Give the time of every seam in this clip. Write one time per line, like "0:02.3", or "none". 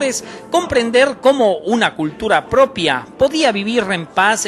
0:01.9